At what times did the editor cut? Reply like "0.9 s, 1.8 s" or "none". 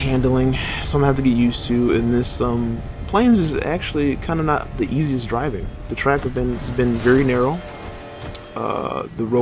5.0 s